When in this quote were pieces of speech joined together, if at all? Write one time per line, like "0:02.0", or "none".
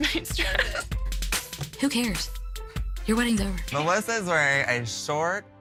none